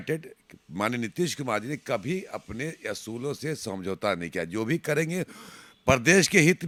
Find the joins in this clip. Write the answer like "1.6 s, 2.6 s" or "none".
none